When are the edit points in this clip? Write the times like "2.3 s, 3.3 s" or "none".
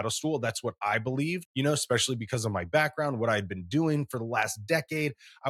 1.5 s